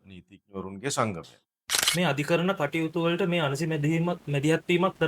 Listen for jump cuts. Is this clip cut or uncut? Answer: cut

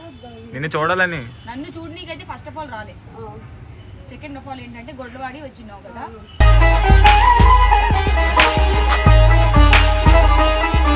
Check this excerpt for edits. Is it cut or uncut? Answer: uncut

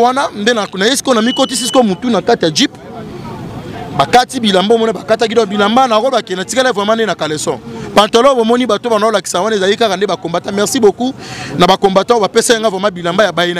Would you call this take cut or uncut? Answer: uncut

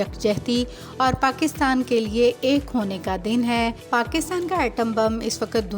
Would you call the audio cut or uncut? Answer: cut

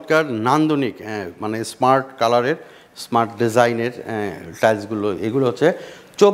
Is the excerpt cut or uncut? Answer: uncut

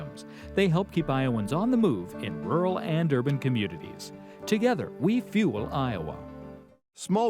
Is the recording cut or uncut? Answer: uncut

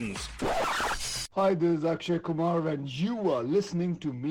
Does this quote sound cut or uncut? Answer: cut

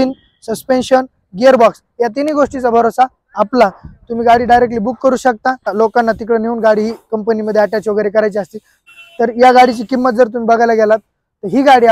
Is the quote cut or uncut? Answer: cut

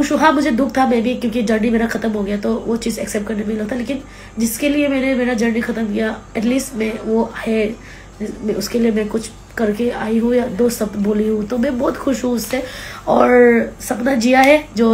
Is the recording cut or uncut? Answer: uncut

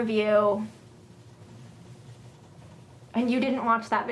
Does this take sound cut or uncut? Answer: uncut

